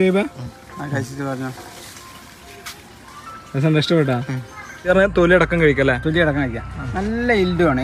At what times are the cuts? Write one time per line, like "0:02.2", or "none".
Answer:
0:04.9